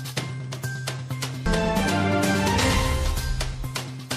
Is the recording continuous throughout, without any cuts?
no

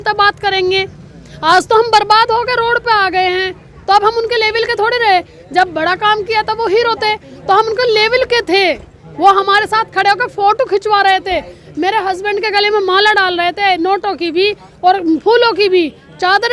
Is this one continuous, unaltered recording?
yes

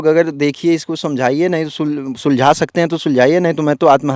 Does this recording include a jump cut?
no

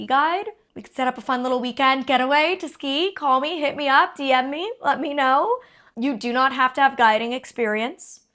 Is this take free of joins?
yes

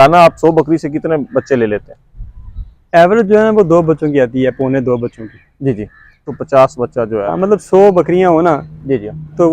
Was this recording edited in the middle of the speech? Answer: yes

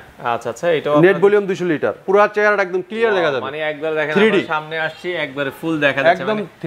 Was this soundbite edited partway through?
yes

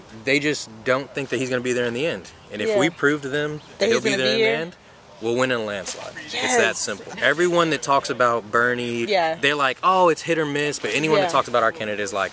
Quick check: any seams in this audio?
yes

